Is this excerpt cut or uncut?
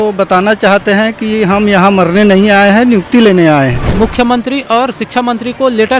cut